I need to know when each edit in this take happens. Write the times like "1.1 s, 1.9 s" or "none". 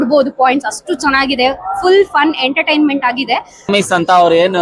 3.7 s